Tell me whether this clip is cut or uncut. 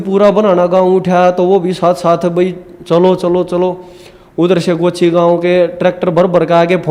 uncut